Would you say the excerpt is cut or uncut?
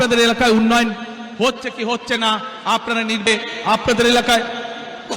cut